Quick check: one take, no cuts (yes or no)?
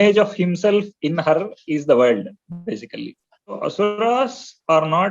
no